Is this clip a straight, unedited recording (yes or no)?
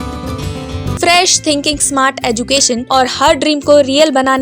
no